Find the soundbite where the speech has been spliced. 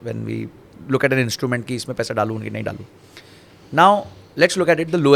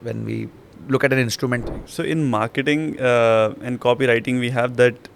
second; 1 cut; at 1.6 s

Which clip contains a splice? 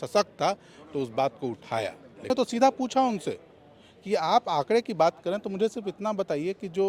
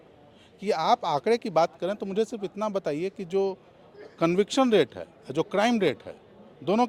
first; 1 cut; at 2.3 s

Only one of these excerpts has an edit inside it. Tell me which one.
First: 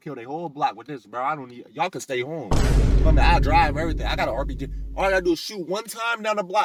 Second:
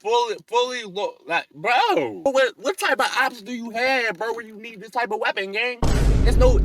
second; 1 cut; at 2.2 s

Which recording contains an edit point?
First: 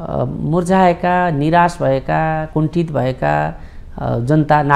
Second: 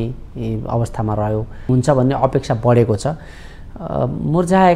second; 1 cut; at 1.7 s

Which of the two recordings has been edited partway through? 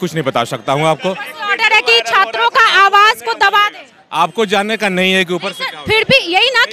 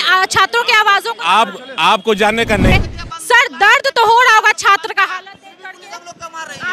second; 1 cut; at 2.7 s

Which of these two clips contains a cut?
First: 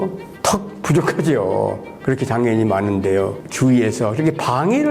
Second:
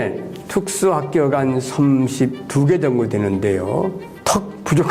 first; 1 cut; at 3.4 s

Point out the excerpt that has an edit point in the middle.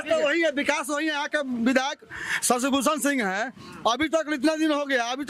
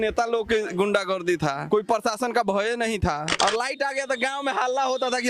second; 2 cuts; at 1.6 s, 3.3 s

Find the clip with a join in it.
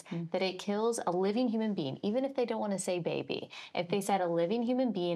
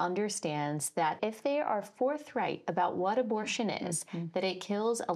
second; 1 cut; at 1.2 s

